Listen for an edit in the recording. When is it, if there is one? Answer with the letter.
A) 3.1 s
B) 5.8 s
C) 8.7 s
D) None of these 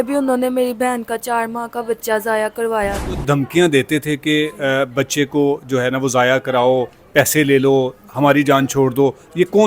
A